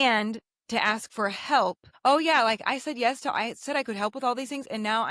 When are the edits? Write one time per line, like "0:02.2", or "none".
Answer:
0:01.9